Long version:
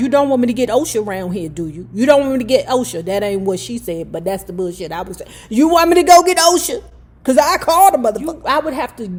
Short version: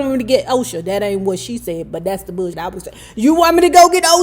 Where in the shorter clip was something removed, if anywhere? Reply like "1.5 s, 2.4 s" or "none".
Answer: 2.6 s